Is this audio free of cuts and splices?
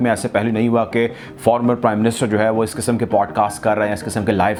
yes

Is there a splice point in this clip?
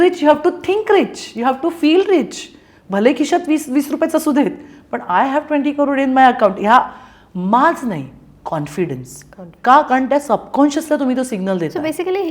no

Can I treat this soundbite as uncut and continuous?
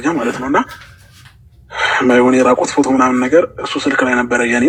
yes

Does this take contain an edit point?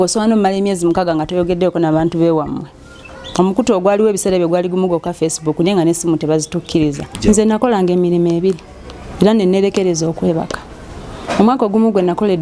yes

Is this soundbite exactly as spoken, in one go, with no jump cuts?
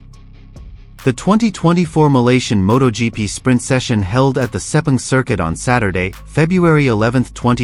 yes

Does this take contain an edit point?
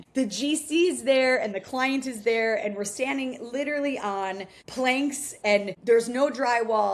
no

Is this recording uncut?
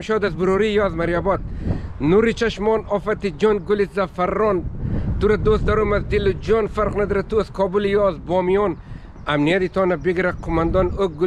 yes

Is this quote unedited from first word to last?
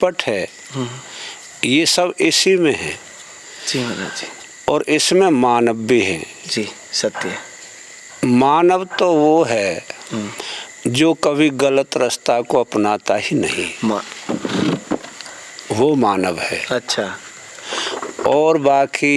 yes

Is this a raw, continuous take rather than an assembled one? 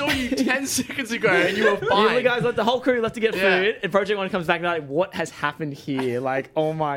yes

